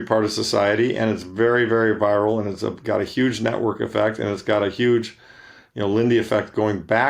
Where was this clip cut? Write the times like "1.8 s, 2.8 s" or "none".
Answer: none